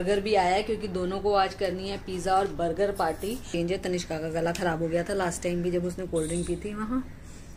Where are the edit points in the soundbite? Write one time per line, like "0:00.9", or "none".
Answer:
0:03.5